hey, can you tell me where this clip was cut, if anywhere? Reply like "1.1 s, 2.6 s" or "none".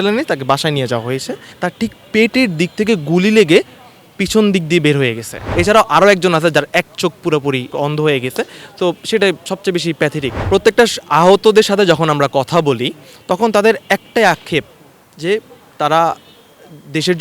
5.5 s, 7.7 s, 10.4 s